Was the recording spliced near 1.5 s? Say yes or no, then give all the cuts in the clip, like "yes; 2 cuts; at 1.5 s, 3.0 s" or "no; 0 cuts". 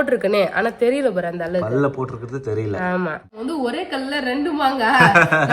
no; 1 cut; at 3.4 s